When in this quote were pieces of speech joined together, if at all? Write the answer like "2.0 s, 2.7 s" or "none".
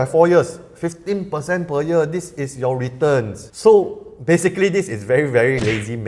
none